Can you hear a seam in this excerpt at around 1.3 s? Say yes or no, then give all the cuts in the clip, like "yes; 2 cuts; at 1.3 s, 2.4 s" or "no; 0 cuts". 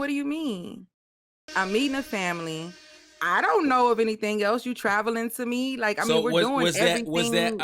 yes; 1 cut; at 1.3 s